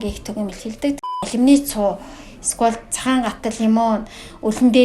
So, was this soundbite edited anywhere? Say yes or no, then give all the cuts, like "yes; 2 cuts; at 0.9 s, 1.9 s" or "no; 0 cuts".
yes; 1 cut; at 1.2 s